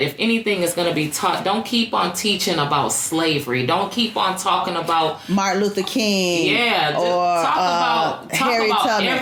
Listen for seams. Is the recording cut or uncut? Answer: uncut